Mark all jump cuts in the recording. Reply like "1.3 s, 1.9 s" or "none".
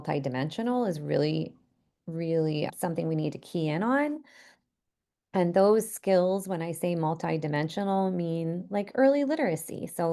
2.7 s